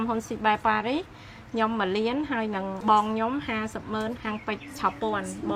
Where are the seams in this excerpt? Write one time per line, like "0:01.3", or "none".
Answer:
none